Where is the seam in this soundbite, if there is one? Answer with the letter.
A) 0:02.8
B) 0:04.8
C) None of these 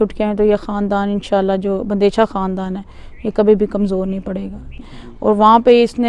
B